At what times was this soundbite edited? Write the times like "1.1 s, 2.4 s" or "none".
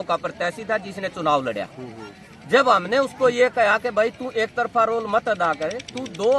none